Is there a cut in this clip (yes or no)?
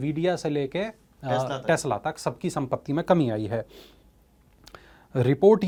no